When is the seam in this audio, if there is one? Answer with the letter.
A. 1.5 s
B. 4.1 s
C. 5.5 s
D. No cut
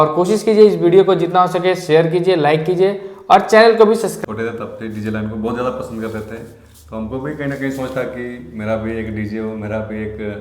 B